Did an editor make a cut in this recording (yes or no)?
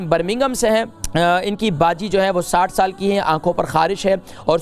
yes